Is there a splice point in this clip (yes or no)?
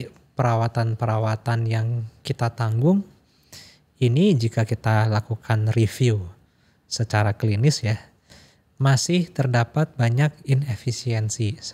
no